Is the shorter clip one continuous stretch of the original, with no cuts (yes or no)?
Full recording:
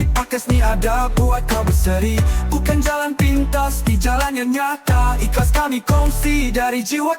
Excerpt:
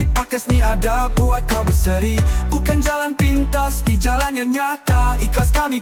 yes